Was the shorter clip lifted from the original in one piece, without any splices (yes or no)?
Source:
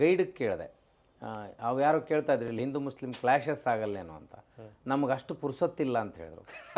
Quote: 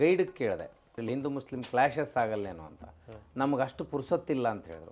no